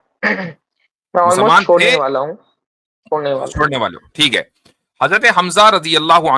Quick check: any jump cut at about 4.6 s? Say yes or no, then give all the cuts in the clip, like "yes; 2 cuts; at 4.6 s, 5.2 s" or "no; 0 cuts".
no; 0 cuts